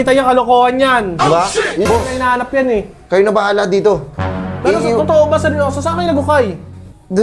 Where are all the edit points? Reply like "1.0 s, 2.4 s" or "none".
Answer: 1.9 s